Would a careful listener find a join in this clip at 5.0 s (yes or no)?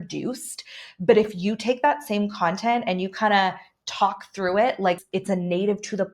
yes